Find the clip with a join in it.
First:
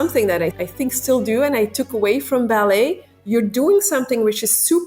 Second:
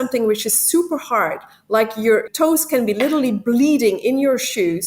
second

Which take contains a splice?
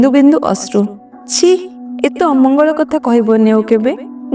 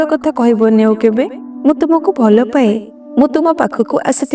first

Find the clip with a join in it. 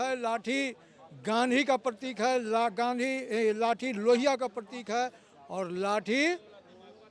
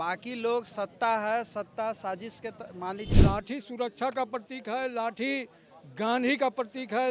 second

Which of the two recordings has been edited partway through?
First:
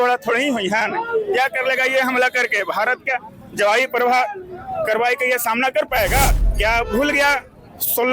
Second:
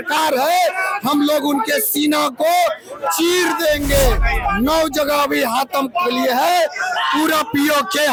first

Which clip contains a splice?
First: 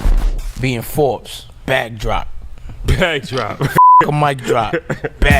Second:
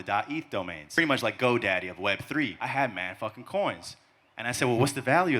second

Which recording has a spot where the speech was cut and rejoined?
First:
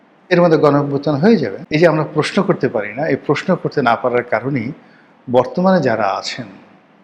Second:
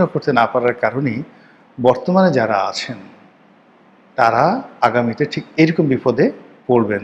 first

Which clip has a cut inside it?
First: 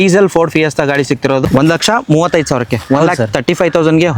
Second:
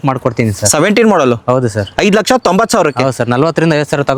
first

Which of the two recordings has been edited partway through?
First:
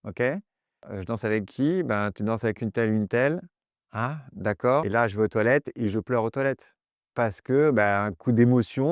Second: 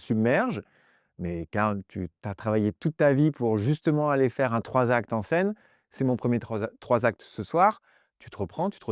first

